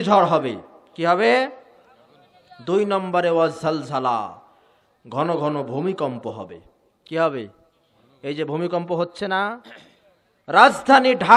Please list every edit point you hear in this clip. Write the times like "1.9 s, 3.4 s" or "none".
none